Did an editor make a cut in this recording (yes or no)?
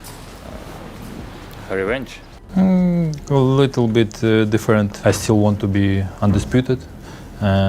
yes